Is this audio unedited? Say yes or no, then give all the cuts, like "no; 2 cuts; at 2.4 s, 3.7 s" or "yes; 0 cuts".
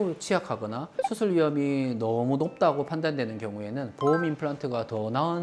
yes; 0 cuts